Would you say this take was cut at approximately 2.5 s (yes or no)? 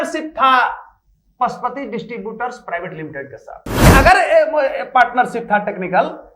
no